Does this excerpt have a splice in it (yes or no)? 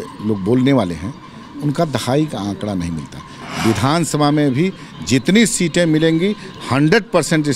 yes